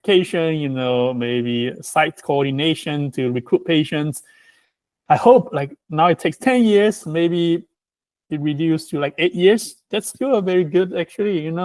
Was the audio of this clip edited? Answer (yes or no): no